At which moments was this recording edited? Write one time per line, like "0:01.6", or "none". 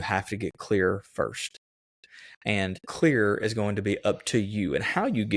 0:02.9

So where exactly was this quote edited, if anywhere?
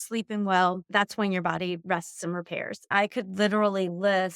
0:02.9

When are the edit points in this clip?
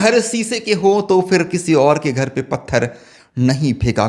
none

